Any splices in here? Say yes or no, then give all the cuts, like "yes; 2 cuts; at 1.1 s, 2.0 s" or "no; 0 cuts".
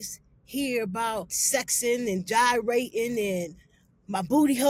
yes; 1 cut; at 1.4 s